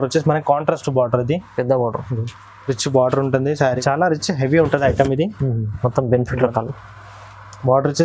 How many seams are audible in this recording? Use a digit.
1